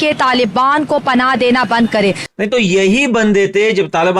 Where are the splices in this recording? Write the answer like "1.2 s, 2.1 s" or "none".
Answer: 2.3 s